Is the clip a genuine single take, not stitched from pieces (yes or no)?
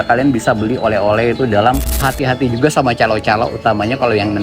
no